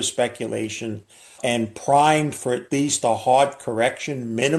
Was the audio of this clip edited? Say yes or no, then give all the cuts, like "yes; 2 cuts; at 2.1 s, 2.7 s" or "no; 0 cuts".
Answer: yes; 1 cut; at 1.4 s